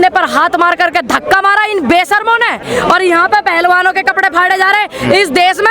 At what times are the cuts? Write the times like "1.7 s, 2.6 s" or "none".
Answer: 2.6 s